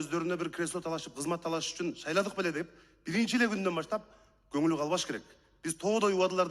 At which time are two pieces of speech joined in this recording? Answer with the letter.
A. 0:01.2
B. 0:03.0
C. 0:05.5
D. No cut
D